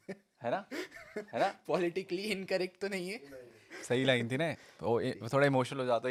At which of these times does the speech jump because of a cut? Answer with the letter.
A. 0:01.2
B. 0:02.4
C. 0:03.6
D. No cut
D